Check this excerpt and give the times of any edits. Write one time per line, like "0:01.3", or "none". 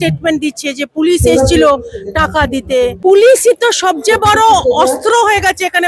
0:02.9